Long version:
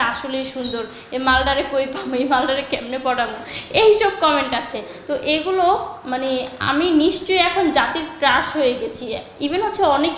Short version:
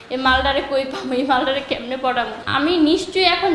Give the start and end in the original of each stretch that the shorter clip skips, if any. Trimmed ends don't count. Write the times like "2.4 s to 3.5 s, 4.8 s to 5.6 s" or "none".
3.4 s to 6.6 s